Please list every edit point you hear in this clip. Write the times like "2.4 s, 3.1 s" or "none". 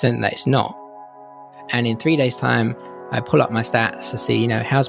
1.2 s